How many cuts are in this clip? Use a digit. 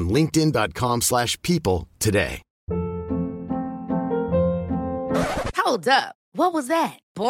1